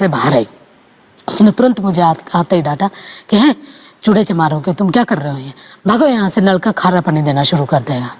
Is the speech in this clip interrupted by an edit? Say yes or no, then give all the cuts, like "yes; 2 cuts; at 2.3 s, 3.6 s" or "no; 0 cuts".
no; 0 cuts